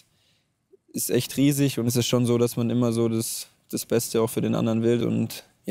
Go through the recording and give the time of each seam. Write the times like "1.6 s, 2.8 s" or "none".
1.9 s, 5.0 s